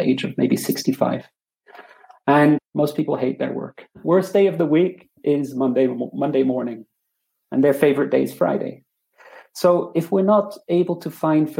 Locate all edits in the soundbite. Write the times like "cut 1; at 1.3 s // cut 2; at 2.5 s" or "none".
cut 1; at 2.7 s // cut 2; at 3.8 s

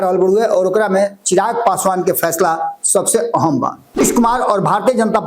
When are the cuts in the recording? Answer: cut 1; at 4.0 s

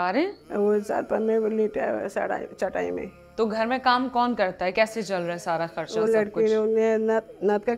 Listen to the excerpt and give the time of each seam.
none

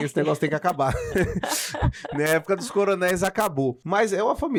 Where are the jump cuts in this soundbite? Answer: none

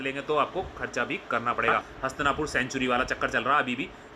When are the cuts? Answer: cut 1; at 1.9 s

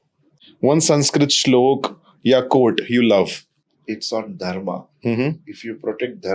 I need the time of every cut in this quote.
none

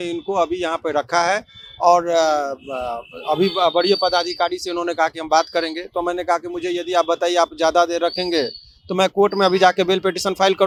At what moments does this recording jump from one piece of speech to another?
none

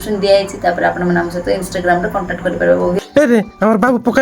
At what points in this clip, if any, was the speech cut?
cut 1; at 3.1 s

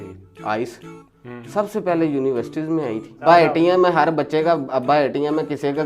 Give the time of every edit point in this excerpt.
cut 1; at 3.2 s

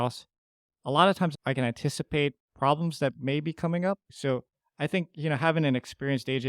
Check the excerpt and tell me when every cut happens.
cut 1; at 1.3 s // cut 2; at 4.1 s

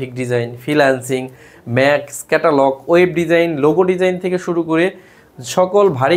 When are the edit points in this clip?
none

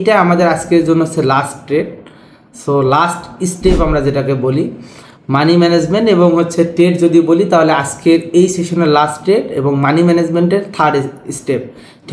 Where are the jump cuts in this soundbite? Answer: none

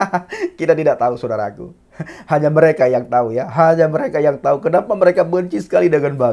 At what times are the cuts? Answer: none

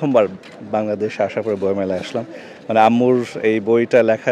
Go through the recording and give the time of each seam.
none

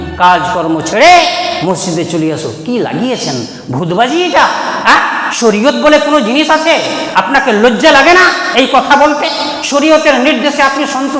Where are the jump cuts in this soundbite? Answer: none

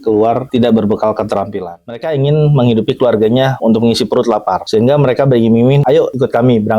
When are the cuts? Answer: cut 1; at 1.6 s // cut 2; at 3.6 s // cut 3; at 4.6 s // cut 4; at 5.9 s

